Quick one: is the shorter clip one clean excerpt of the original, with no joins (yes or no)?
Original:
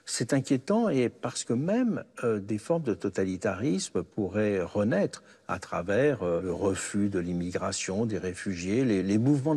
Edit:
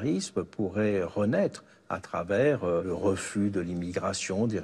yes